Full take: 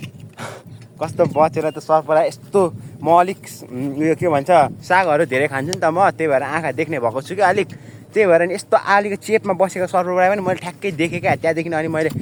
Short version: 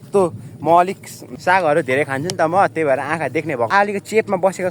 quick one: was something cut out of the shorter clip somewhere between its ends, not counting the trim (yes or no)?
yes